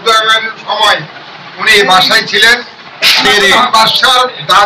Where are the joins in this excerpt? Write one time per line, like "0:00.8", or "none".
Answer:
0:03.4